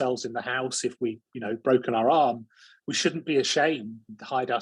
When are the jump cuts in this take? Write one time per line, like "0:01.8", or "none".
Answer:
none